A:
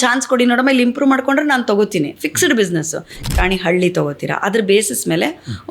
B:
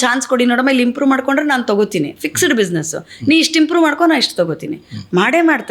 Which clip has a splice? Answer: A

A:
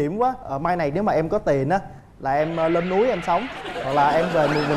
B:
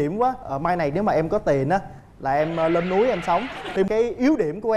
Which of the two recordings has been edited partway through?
B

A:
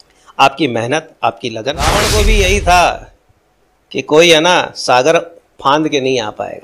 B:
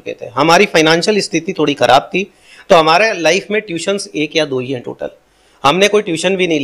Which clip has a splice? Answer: A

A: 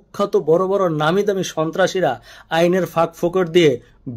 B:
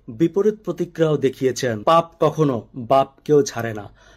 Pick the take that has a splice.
B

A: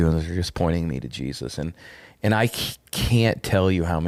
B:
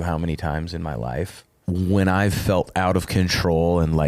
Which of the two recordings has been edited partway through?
B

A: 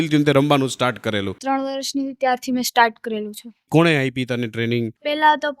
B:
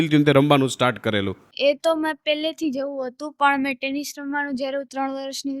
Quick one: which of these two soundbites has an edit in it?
A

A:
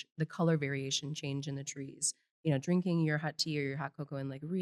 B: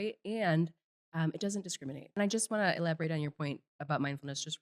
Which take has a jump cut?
B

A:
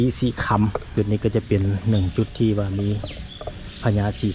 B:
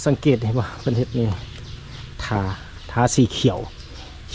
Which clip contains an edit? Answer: A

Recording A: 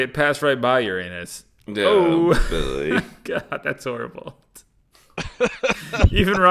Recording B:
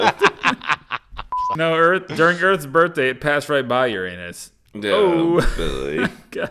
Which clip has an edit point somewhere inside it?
B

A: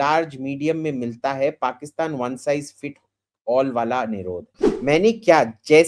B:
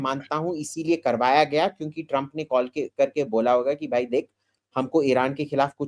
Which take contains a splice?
A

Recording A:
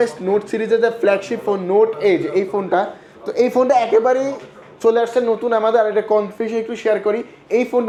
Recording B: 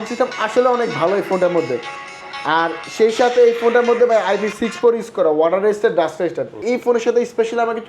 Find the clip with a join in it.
B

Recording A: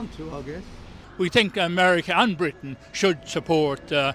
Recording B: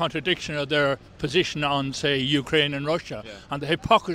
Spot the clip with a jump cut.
A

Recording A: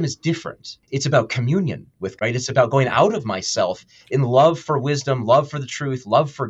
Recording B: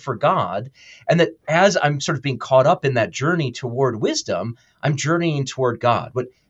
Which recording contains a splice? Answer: A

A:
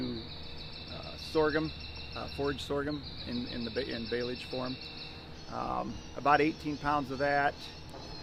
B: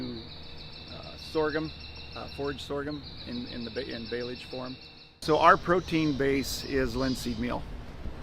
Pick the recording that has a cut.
B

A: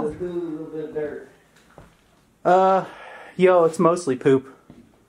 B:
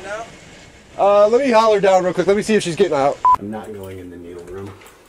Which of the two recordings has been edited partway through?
B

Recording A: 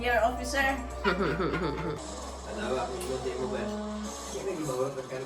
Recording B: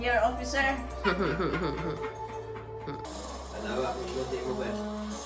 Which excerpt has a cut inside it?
A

